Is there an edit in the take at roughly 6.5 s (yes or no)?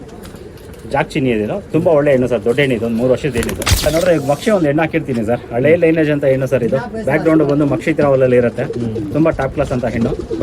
no